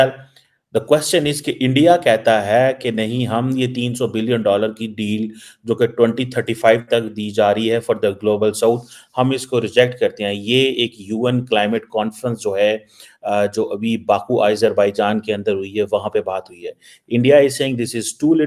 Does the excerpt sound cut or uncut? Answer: uncut